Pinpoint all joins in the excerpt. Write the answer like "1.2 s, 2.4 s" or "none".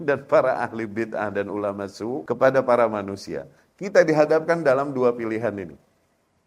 2.2 s